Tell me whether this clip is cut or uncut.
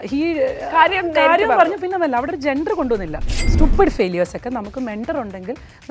cut